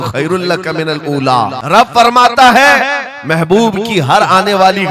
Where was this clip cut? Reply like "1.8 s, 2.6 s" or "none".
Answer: 1.6 s